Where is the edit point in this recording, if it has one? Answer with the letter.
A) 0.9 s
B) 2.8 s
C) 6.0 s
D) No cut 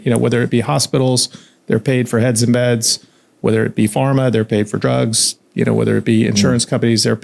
D